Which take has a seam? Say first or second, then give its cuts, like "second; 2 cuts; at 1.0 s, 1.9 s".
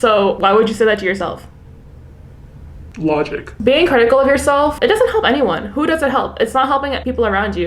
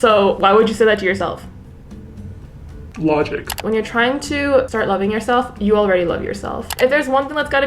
second; 2 cuts; at 3.6 s, 6.7 s